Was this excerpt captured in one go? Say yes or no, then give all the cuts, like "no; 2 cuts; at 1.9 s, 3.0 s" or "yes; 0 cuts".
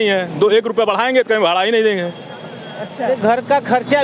no; 1 cut; at 3.0 s